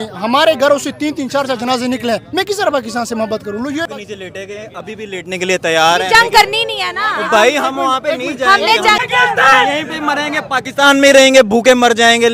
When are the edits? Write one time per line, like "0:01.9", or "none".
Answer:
0:03.9
0:09.0